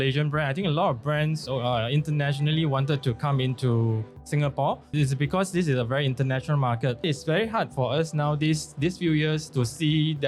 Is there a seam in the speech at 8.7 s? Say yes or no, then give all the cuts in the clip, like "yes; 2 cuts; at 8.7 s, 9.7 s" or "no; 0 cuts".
yes; 3 cuts; at 4.9 s, 7.0 s, 8.7 s